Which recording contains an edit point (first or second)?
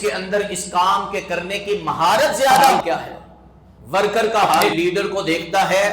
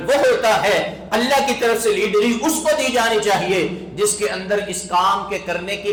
first